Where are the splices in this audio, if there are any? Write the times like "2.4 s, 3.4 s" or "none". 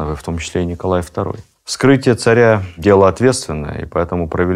1.4 s